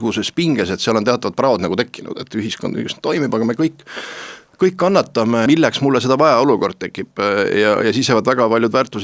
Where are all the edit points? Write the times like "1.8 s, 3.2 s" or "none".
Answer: 5.5 s